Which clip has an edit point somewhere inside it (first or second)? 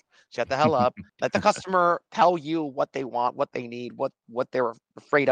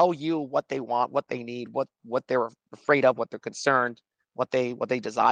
first